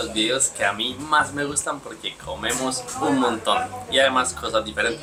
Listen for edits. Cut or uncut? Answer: uncut